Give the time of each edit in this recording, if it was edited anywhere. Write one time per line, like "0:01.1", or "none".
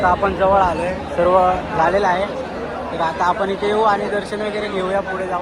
none